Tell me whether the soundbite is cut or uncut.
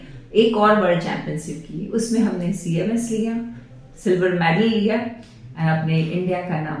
uncut